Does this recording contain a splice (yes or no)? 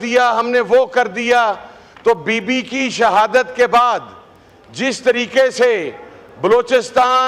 no